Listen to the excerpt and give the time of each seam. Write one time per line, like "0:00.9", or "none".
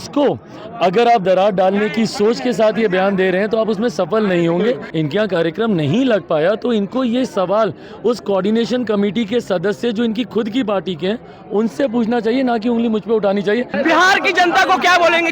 0:04.9
0:13.7